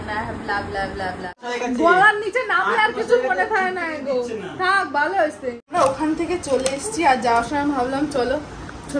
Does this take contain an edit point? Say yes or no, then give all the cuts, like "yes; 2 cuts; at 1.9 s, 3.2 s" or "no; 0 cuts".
yes; 2 cuts; at 1.5 s, 5.6 s